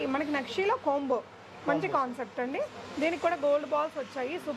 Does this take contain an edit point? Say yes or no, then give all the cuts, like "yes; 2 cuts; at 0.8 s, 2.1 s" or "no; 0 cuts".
no; 0 cuts